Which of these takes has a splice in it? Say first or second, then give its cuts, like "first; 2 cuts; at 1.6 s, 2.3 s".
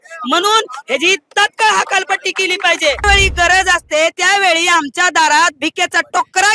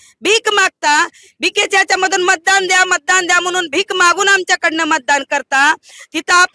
first; 1 cut; at 3.0 s